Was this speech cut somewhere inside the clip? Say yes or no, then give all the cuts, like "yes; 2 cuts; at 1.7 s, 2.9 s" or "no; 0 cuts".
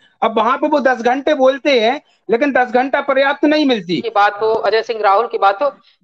yes; 1 cut; at 4.0 s